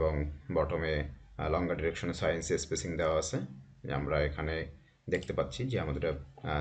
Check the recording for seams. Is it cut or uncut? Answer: uncut